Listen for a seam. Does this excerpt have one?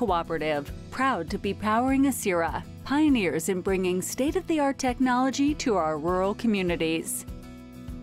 yes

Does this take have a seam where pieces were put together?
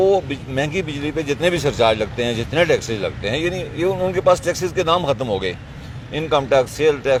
no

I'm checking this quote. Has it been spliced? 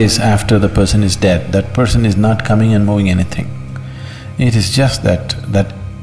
no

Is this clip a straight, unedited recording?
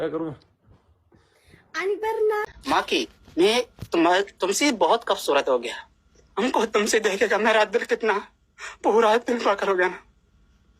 no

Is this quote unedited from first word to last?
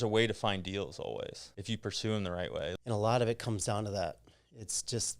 no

